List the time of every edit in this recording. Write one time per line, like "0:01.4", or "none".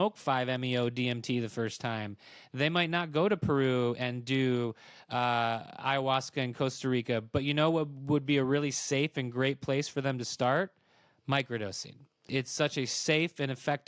0:12.2